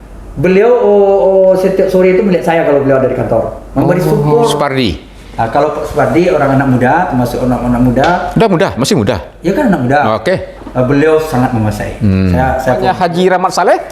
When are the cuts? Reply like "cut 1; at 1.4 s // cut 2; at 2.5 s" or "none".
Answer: cut 1; at 4.5 s // cut 2; at 12.8 s